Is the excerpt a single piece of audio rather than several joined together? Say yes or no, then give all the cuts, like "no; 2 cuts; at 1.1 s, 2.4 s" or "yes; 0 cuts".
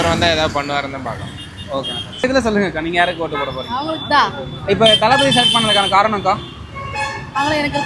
yes; 0 cuts